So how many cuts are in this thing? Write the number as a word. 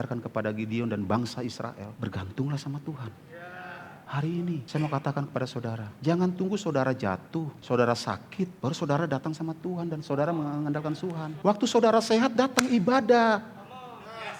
seven